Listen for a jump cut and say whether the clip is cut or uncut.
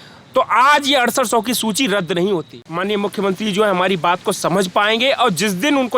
cut